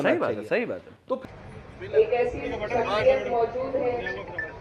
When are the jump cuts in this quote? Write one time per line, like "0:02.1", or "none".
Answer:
0:01.2